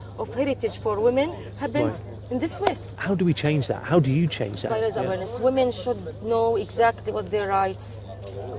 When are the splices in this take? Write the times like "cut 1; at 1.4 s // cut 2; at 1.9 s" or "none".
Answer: cut 1; at 2.9 s // cut 2; at 4.7 s